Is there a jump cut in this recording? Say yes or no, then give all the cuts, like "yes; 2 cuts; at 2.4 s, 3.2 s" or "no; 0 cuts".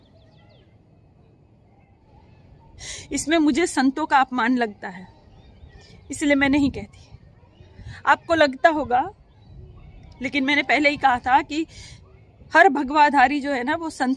yes; 1 cut; at 2.0 s